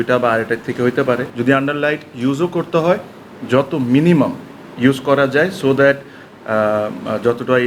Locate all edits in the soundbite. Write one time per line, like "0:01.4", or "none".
0:01.3